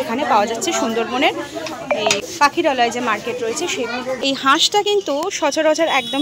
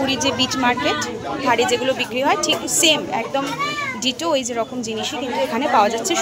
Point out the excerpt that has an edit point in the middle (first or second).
first